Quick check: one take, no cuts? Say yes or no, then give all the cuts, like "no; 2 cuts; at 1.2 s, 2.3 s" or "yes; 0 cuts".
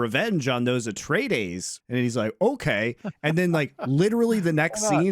no; 1 cut; at 1.8 s